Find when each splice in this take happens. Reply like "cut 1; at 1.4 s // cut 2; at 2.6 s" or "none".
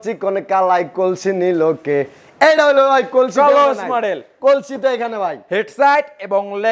none